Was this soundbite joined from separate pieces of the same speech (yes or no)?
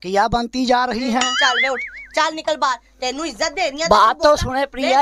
no